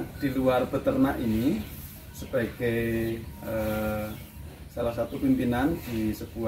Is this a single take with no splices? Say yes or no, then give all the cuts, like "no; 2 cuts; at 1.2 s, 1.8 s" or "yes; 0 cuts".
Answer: yes; 0 cuts